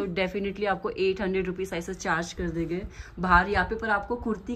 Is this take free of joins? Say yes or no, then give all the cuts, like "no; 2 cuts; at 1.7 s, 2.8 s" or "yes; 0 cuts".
yes; 0 cuts